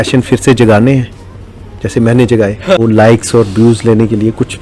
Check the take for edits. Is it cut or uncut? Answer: cut